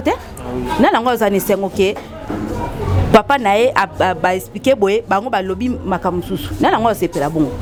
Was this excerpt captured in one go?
yes; 0 cuts

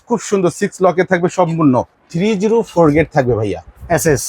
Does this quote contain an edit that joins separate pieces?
yes; 1 cut; at 1.9 s

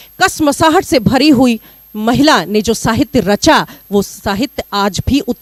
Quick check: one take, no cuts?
yes; 0 cuts

